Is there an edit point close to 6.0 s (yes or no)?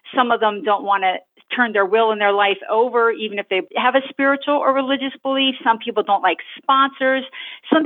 no